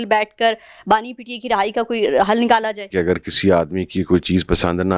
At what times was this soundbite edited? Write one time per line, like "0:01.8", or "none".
0:02.9